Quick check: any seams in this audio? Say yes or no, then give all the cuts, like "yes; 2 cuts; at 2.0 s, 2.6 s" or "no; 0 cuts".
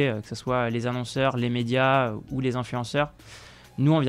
no; 0 cuts